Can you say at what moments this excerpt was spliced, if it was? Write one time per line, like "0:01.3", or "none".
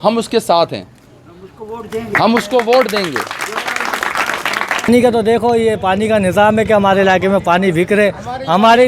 0:04.9